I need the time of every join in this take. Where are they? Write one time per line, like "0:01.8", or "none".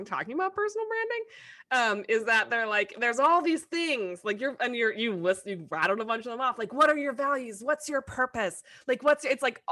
none